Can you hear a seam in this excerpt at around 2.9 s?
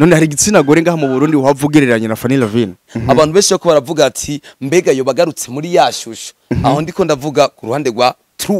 yes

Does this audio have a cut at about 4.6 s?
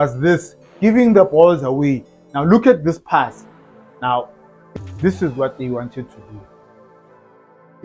yes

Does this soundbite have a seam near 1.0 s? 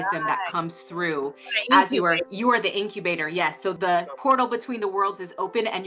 no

